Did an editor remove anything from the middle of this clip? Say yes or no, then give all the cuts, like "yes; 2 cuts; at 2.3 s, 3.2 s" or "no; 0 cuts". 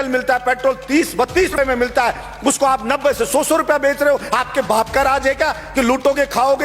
yes; 1 cut; at 1.6 s